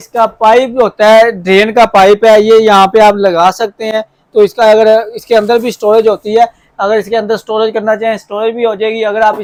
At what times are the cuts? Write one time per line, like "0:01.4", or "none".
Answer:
none